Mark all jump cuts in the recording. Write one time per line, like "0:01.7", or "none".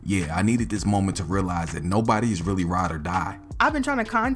0:03.4